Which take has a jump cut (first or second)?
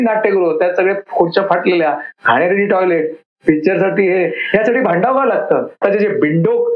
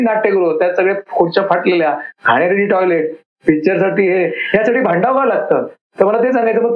first